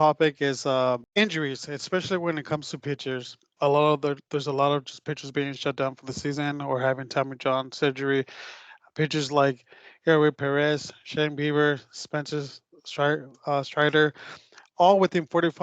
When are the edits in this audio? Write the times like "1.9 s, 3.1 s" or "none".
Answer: 1.1 s, 3.4 s